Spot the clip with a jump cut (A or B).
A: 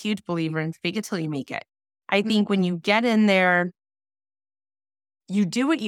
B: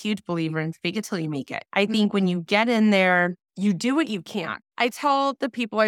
B